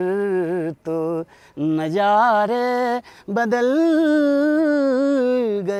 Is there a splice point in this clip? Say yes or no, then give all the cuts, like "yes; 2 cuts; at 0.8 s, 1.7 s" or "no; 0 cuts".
no; 0 cuts